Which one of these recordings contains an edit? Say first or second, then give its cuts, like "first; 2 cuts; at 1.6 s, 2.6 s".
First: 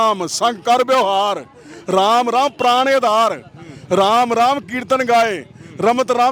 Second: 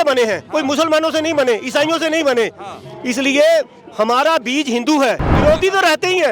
second; 1 cut; at 5.3 s